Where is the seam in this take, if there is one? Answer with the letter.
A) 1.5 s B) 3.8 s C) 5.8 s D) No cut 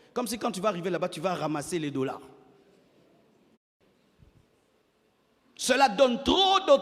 B